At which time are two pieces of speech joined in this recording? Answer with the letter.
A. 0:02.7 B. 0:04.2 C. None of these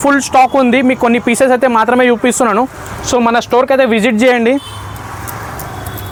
C